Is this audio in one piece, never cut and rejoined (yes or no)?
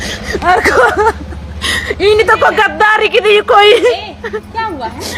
yes